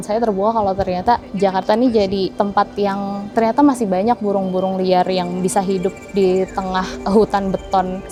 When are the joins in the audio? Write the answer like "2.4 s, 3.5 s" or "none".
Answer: none